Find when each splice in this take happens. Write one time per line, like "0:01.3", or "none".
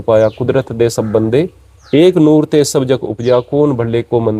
none